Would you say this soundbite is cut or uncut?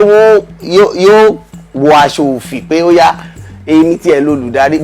cut